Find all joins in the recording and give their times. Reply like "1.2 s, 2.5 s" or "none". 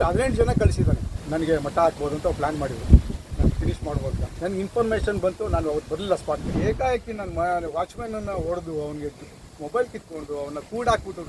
1.1 s, 4.2 s, 6.5 s